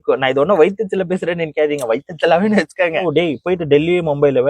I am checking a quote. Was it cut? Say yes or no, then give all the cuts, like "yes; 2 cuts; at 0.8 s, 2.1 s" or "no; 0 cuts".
yes; 1 cut; at 3.1 s